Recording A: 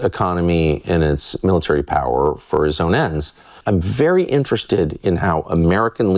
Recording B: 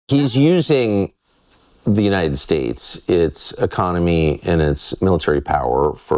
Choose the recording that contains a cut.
A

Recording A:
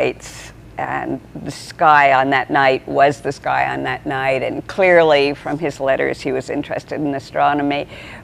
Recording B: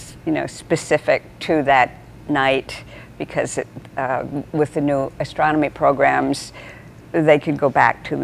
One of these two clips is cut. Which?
A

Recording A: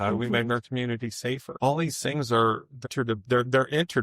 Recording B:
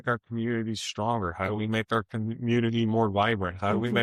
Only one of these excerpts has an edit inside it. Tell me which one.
A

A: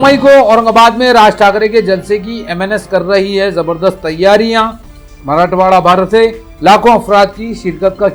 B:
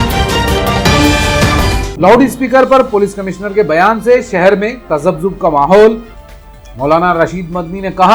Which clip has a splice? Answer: B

